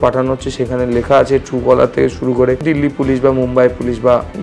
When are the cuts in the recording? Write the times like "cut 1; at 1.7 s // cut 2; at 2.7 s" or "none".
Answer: cut 1; at 2.6 s